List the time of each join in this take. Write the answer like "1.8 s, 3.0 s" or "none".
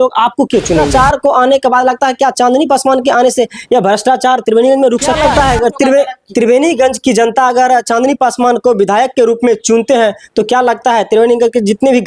0.9 s, 5.2 s